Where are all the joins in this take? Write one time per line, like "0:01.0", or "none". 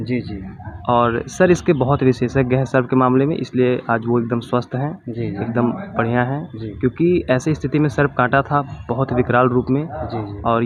none